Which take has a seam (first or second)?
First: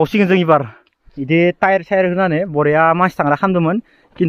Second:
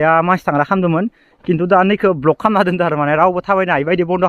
first